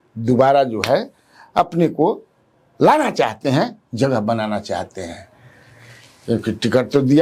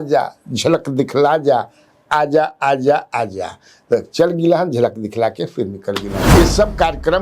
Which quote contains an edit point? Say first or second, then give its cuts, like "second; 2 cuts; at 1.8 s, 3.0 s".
second; 1 cut; at 6.2 s